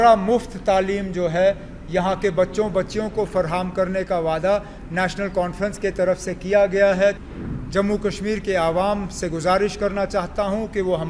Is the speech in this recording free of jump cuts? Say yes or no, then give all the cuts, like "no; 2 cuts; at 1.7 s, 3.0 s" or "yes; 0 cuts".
no; 1 cut; at 7.2 s